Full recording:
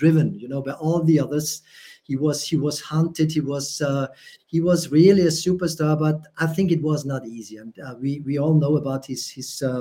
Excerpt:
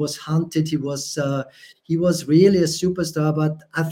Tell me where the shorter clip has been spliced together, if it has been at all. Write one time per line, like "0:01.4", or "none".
none